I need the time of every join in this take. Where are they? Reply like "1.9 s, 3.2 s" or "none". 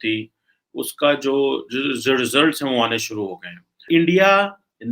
3.9 s